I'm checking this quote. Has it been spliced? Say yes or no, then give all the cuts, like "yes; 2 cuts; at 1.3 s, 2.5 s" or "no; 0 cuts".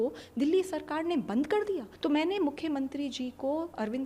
yes; 1 cut; at 1.9 s